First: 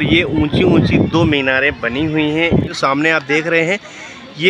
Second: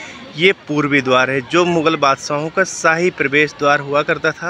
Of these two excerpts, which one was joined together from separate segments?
first; 1 cut; at 2.7 s

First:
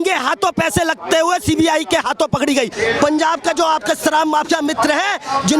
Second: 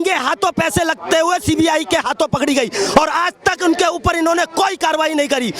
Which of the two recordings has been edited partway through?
first; 1 cut; at 2.7 s

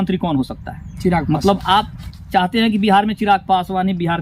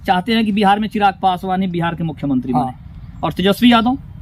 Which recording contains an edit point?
first; 1 cut; at 1.2 s

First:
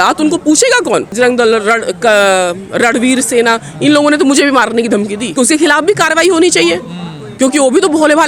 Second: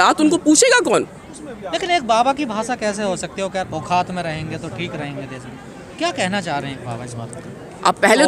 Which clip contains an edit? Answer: first; 2 cuts; at 1.2 s, 5.3 s

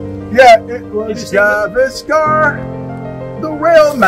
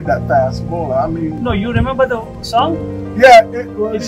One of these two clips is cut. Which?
second; 1 cut; at 1.4 s

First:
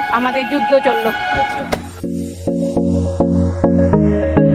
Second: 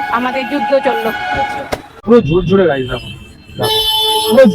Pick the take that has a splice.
second; 1 cut; at 1.9 s

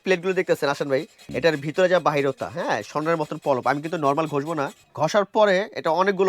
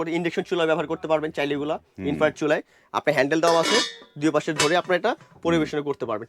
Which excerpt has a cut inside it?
first; 2 cuts; at 1.2 s, 4.8 s

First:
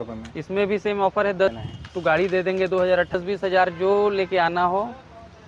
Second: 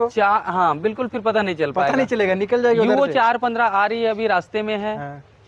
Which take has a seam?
first; 2 cuts; at 1.5 s, 3.2 s

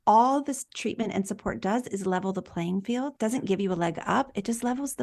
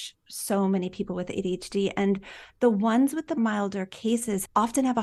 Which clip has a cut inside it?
first; 1 cut; at 3.1 s

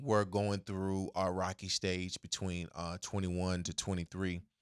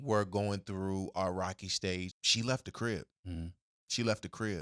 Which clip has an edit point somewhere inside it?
second; 1 cut; at 2.2 s

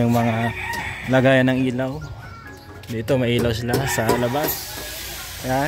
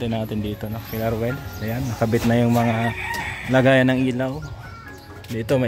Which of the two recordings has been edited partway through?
first; 1 cut; at 4.6 s

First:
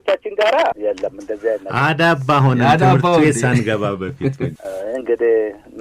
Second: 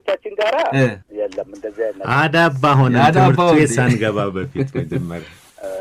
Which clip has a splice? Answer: first; 2 cuts; at 0.7 s, 4.5 s

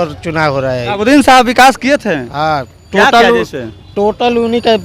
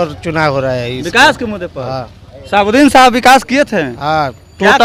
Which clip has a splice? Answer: first; 1 cut; at 1.0 s

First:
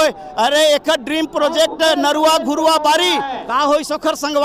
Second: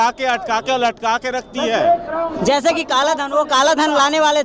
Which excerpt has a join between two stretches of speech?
second; 1 cut; at 2.3 s

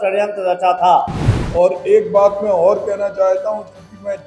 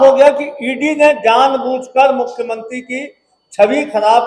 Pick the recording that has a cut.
first; 1 cut; at 1.2 s

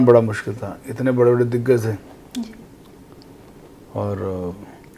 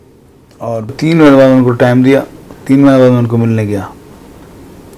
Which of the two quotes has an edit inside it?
second; 1 cut; at 0.9 s

